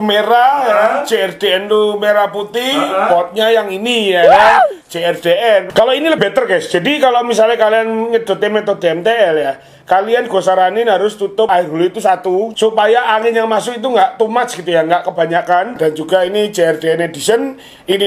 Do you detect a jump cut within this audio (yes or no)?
yes